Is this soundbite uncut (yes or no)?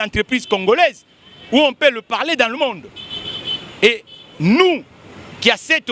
yes